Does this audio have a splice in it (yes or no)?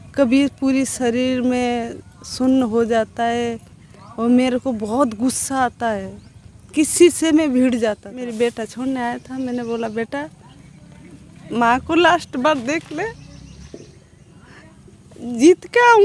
yes